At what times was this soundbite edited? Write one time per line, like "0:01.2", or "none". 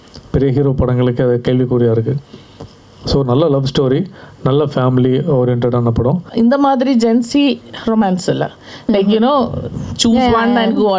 0:06.3